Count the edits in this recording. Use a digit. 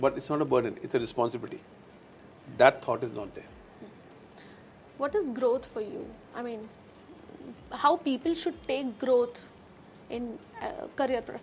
0